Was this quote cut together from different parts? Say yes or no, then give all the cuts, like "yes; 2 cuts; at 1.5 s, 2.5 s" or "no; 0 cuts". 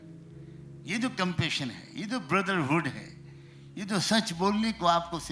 no; 0 cuts